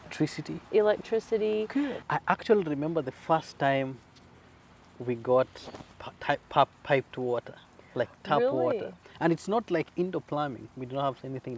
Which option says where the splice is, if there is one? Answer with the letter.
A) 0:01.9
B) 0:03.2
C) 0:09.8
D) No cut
A